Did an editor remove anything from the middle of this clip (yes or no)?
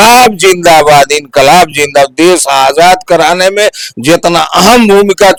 no